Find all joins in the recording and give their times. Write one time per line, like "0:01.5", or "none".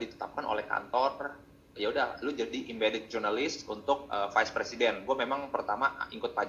none